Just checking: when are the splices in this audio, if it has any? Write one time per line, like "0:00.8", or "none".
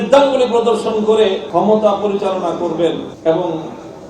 0:01.5
0:03.1

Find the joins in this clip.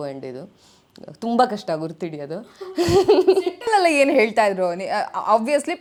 none

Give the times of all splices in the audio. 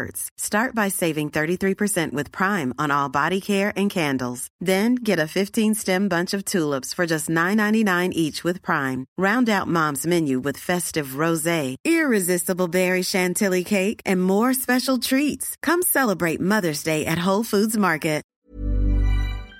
0:18.3

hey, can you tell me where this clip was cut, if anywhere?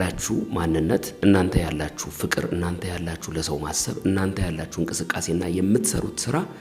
none

